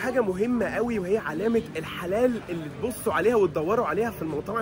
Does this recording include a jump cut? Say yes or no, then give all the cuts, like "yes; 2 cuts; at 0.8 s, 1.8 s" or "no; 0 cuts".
no; 0 cuts